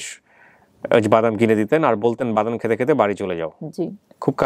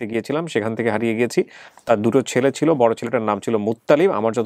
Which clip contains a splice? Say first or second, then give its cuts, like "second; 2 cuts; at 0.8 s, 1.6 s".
second; 1 cut; at 1.7 s